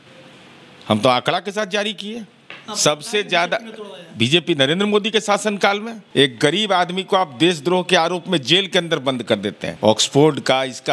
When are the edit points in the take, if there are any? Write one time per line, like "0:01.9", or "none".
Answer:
0:06.0
0:09.6